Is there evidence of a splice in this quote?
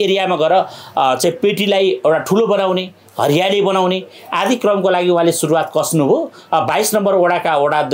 no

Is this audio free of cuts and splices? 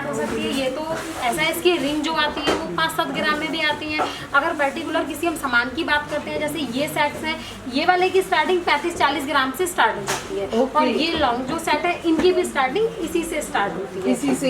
yes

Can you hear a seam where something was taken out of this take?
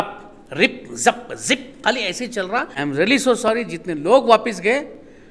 yes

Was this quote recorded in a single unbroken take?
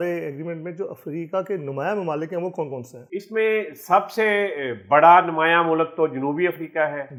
yes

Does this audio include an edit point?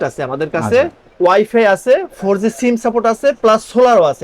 no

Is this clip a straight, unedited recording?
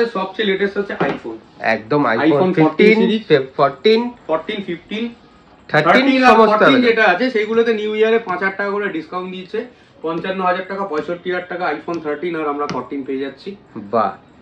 yes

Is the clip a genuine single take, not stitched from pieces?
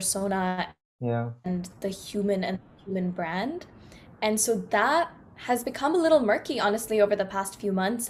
yes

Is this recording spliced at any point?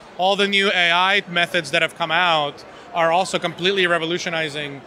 yes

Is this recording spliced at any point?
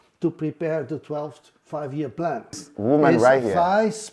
yes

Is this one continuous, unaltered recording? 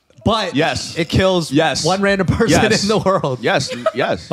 yes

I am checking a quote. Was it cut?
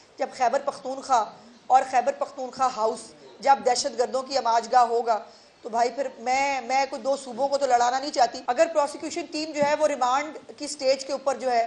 yes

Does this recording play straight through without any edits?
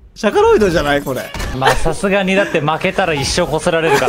no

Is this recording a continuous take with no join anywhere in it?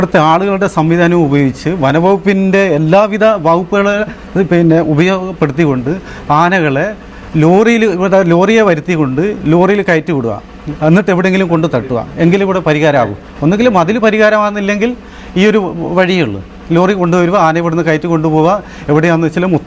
yes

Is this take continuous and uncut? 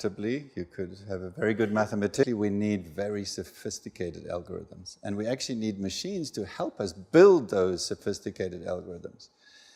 yes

